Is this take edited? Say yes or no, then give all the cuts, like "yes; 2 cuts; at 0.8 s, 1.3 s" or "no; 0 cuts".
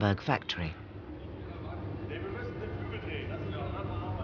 no; 0 cuts